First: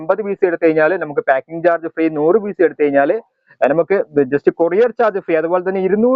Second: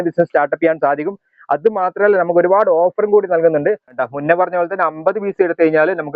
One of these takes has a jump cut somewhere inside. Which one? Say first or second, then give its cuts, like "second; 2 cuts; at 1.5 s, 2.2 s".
second; 1 cut; at 3.9 s